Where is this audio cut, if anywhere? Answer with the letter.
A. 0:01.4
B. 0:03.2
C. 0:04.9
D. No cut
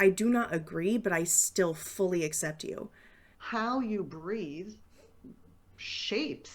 B